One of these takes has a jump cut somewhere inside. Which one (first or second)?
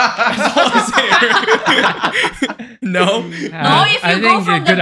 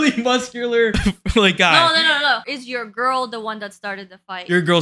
second